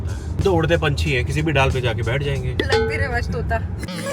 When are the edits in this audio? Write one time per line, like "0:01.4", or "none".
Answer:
0:03.0